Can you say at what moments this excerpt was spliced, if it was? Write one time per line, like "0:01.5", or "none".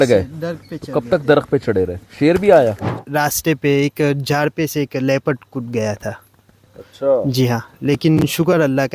0:02.9